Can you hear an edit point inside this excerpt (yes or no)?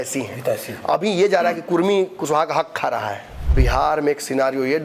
yes